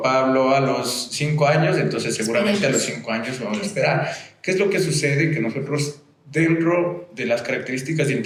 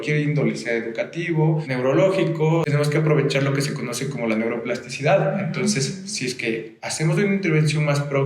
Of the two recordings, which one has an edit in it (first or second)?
second